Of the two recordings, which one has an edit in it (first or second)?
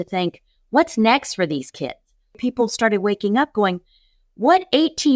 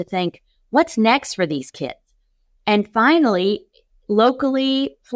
first